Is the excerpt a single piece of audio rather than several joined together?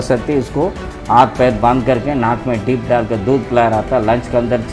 yes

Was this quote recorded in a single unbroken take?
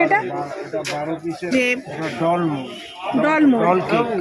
no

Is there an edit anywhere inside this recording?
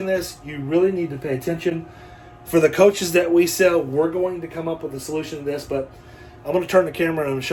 no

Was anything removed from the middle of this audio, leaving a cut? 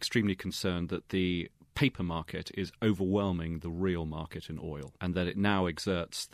yes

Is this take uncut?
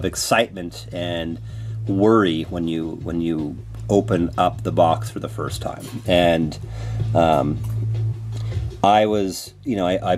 yes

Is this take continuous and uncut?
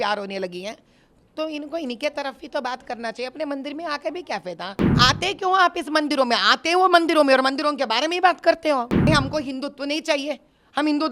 no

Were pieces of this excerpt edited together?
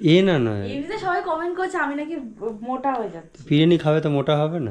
no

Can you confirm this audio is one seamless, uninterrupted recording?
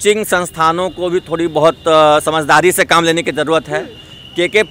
yes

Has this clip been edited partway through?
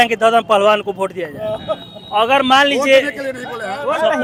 no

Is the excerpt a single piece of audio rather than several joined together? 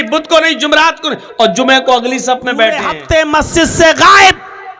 no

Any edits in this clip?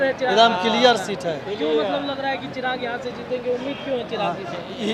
no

